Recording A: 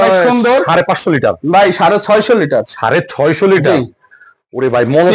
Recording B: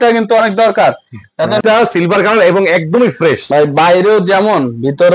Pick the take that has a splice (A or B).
B